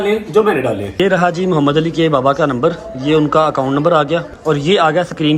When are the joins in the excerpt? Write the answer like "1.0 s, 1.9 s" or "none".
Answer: 0.9 s, 4.3 s

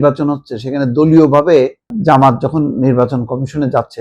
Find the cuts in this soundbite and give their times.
1.9 s

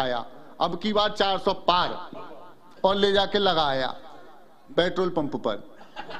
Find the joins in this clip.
none

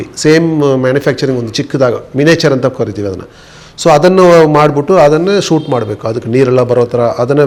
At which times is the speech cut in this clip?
none

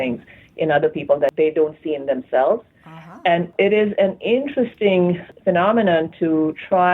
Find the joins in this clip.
1.3 s, 3.5 s, 5.3 s

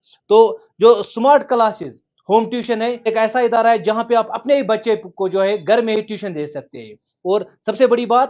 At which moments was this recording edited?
3.1 s

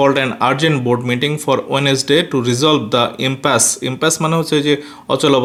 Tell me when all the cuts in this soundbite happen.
none

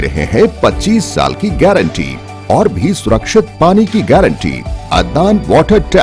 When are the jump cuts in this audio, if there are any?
4.7 s

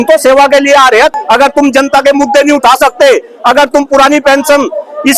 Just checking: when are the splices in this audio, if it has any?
1.2 s

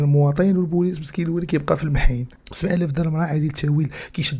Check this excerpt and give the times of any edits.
2.4 s

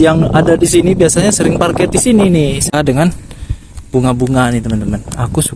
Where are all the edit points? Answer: 2.7 s

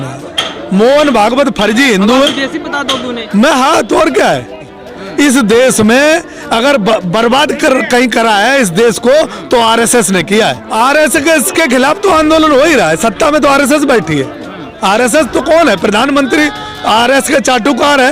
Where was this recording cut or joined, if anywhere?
4.8 s, 10.6 s

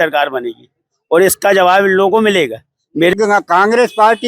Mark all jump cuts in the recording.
3.1 s

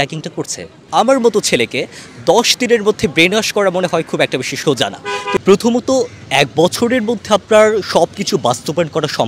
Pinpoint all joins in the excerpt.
0.8 s, 5.4 s

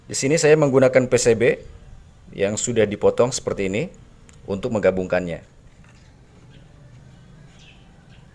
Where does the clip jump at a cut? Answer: 5.6 s

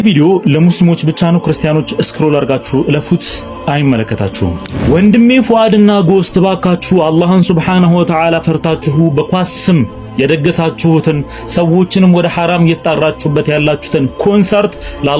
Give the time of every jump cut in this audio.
none

